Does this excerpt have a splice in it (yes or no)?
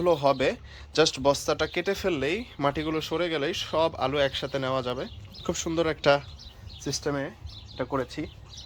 no